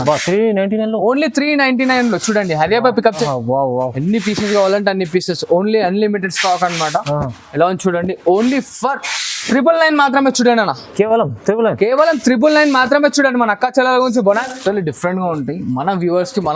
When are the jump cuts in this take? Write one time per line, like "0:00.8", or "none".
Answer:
0:03.2
0:14.4